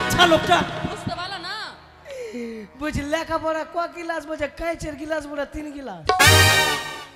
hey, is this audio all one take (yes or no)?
yes